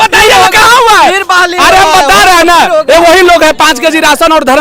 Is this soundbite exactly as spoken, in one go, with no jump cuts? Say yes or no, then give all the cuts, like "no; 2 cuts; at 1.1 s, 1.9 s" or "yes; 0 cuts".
yes; 0 cuts